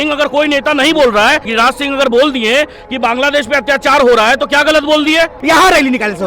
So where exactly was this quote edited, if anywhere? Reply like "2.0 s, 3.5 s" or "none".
1.5 s, 5.4 s